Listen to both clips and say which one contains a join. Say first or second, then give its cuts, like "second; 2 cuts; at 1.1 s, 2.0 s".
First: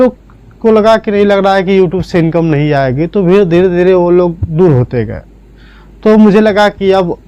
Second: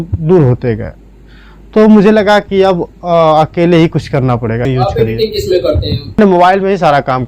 second; 2 cuts; at 4.6 s, 6.2 s